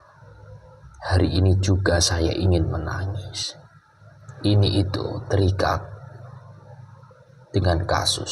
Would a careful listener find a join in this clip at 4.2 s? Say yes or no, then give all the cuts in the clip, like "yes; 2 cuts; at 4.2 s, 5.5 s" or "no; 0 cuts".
yes; 1 cut; at 4.2 s